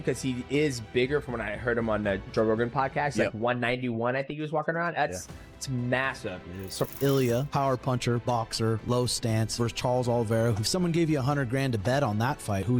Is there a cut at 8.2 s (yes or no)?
no